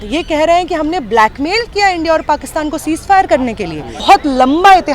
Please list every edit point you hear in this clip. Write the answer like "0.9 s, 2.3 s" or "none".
3.9 s